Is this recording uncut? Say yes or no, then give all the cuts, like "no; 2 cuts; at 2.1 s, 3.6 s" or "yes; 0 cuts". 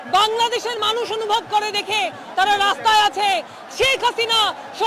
yes; 0 cuts